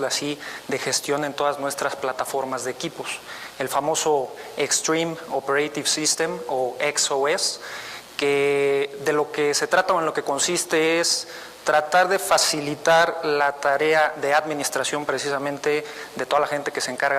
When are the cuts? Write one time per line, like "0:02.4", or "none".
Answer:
0:05.7